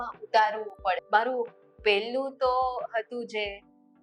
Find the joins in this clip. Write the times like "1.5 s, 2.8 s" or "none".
1.0 s

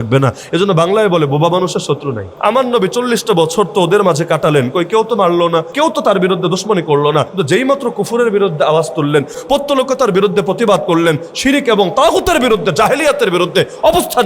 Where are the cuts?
2.3 s, 5.7 s, 7.3 s, 9.4 s

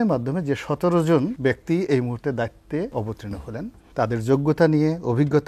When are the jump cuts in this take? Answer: 1.4 s, 3.2 s

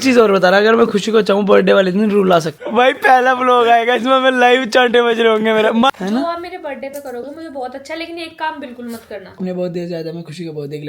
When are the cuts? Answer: 2.6 s, 5.9 s, 9.4 s

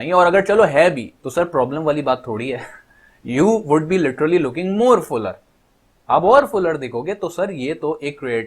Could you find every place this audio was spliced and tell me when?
1.1 s

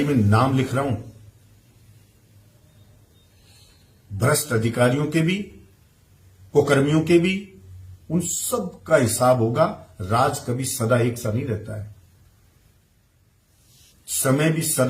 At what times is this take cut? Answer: 13.3 s

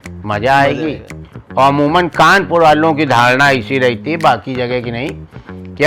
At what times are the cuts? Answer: none

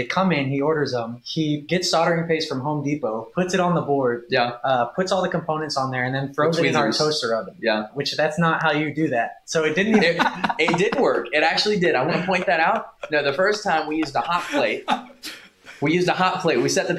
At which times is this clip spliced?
1.6 s, 8.0 s

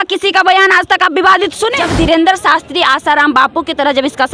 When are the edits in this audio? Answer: 1.8 s

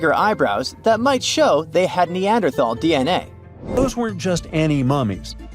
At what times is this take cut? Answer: 3.8 s

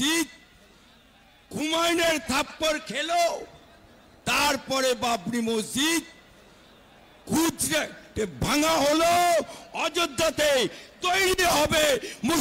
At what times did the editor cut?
1.6 s

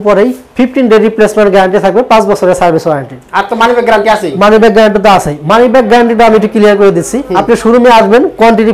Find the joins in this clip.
none

